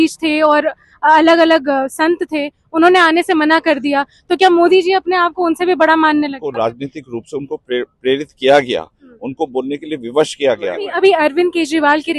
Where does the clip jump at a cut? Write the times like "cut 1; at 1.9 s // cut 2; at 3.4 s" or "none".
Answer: cut 1; at 6.4 s // cut 2; at 10.8 s